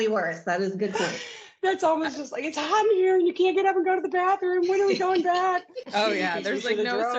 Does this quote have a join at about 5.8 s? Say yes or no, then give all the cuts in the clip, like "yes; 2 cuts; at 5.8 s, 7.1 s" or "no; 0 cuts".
yes; 1 cut; at 5.8 s